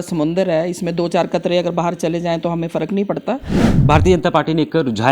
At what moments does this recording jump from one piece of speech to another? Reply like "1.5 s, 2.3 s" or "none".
3.7 s

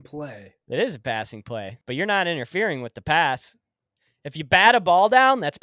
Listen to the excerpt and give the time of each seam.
1.8 s

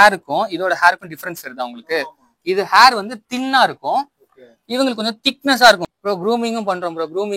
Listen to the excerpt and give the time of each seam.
5.8 s

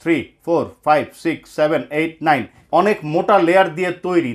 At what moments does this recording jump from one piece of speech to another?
2.5 s

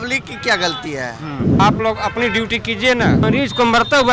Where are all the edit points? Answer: 1.6 s, 3.2 s

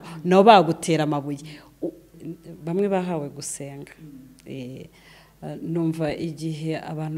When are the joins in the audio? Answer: 2.2 s

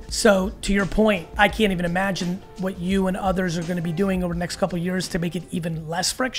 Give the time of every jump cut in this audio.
1.3 s

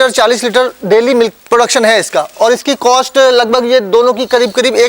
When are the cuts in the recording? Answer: 1.4 s

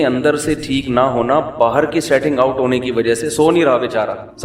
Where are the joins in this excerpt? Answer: none

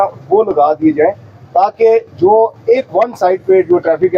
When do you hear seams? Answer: none

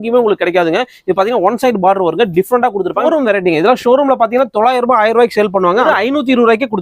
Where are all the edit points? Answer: 3.1 s, 5.9 s

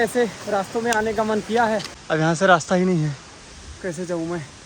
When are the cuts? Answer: 1.9 s

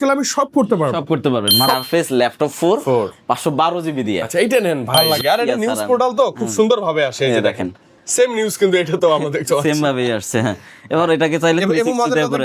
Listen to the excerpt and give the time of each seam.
1.7 s, 4.9 s

